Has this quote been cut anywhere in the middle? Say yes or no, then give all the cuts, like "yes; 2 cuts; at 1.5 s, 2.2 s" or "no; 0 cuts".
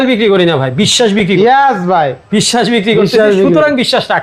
no; 0 cuts